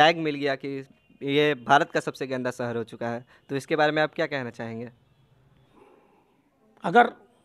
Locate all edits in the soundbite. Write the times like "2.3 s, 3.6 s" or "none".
5.7 s